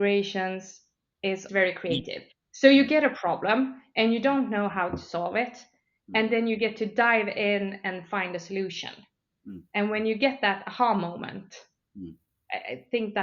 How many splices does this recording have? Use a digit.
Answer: 1